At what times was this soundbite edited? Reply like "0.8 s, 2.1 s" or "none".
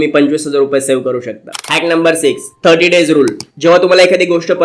none